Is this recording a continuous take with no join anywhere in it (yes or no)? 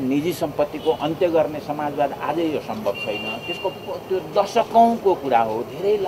yes